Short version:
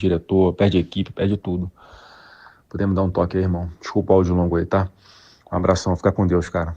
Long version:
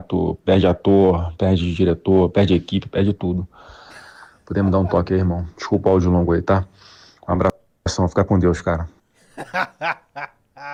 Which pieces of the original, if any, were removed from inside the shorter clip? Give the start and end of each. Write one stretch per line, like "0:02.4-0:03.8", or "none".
0:07.6-0:07.9